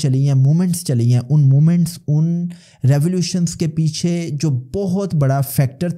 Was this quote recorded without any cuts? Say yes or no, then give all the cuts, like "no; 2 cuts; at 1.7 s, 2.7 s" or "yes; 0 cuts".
yes; 0 cuts